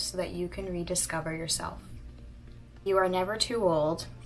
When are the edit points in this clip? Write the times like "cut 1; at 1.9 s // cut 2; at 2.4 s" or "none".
cut 1; at 2.8 s